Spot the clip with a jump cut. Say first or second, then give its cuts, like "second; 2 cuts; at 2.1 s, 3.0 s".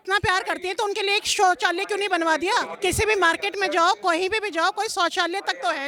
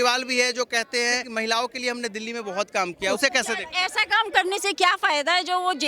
second; 1 cut; at 1.2 s